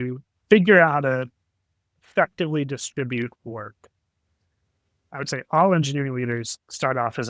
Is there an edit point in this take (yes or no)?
yes